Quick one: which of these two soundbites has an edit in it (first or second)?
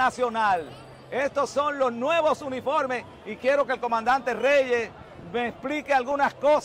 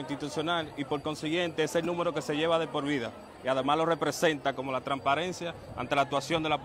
second